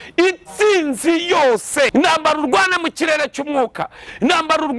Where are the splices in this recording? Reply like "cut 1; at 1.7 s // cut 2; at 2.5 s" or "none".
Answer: cut 1; at 1.9 s